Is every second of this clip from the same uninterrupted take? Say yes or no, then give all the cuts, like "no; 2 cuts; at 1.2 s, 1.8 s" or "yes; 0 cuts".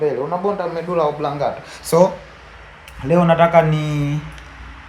yes; 0 cuts